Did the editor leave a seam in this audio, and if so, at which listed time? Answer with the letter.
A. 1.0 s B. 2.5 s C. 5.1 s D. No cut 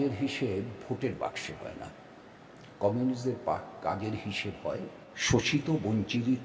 C